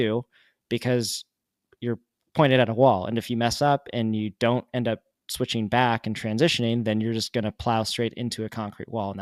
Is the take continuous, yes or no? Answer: yes